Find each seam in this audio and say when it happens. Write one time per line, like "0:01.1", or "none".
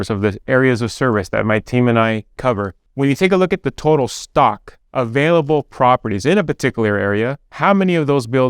0:02.8